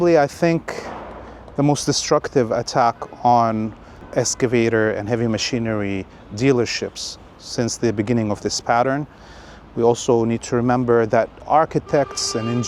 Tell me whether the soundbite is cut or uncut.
cut